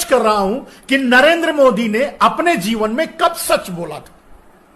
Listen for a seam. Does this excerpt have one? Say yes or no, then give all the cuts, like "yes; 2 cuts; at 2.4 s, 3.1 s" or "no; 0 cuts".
no; 0 cuts